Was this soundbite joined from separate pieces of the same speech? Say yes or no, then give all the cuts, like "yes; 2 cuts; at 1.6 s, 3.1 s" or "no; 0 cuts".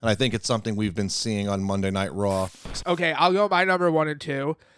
yes; 1 cut; at 2.7 s